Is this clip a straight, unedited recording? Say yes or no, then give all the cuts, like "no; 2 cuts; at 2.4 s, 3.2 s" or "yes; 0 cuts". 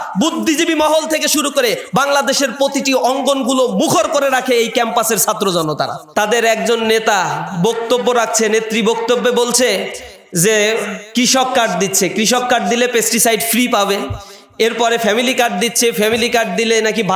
no; 1 cut; at 6.0 s